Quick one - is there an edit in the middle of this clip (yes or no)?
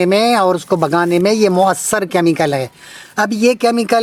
no